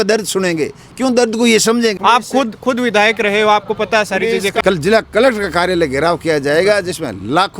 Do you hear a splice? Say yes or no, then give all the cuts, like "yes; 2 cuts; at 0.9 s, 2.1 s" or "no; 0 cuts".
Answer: yes; 2 cuts; at 2.0 s, 4.6 s